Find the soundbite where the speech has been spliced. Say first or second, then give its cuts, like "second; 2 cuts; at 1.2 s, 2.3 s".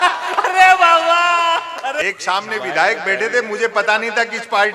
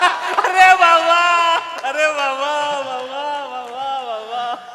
first; 1 cut; at 2.0 s